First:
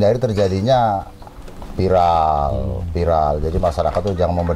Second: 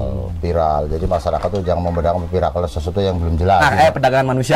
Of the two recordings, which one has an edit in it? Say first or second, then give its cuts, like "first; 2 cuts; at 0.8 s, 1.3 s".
second; 1 cut; at 3.6 s